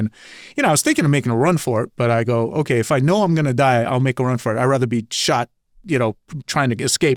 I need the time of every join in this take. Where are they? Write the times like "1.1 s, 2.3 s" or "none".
none